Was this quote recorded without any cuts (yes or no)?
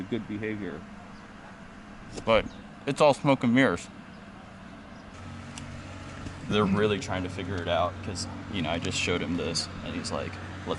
no